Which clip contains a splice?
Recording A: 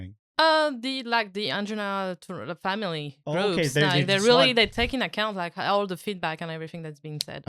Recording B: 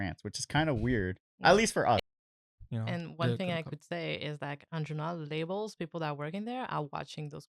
B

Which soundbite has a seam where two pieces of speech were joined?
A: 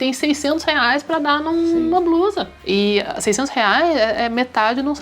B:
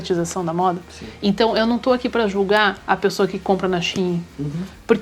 A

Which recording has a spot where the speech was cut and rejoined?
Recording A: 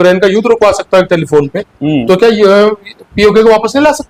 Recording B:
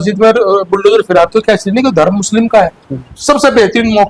B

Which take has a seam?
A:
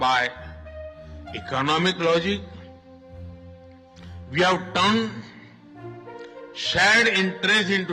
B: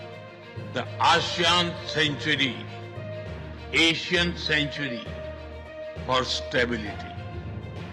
A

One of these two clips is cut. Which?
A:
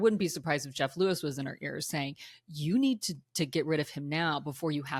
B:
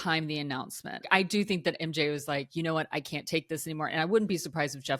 B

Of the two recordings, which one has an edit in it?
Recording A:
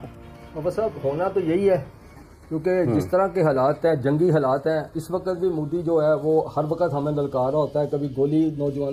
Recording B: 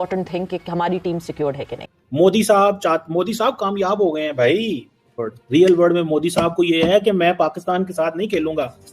B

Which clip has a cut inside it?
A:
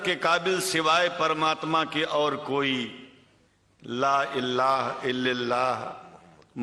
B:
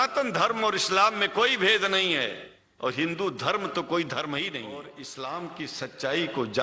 B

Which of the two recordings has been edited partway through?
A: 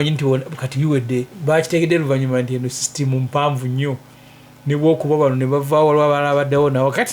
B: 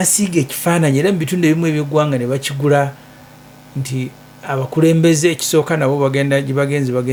A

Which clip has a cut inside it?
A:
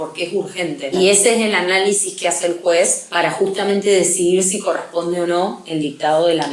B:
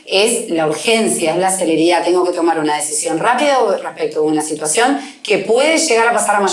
A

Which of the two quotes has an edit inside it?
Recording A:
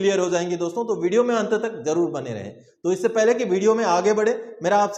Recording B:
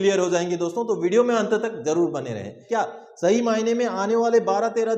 B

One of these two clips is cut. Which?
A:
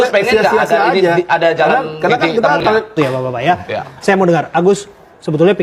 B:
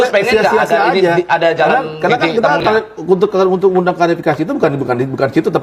A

